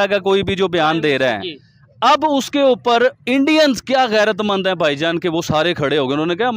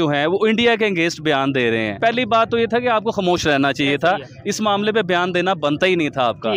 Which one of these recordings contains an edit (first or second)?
second